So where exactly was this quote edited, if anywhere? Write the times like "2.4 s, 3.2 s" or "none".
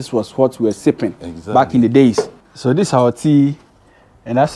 2.4 s